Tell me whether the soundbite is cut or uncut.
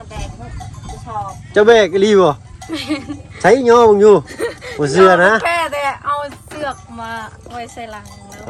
uncut